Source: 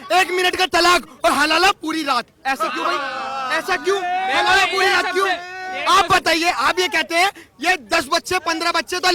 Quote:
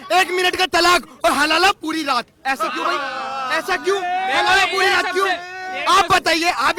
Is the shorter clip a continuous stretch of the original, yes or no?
yes